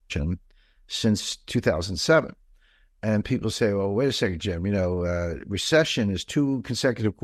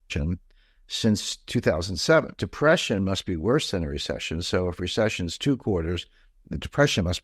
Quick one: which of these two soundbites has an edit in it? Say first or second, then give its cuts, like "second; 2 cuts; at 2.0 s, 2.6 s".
second; 1 cut; at 2.4 s